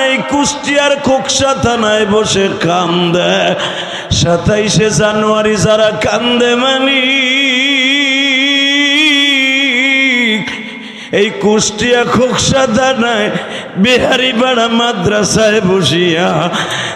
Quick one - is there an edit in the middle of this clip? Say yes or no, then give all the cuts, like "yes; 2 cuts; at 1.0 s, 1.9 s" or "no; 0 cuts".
no; 0 cuts